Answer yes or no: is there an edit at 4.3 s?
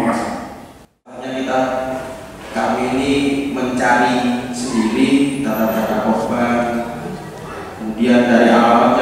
no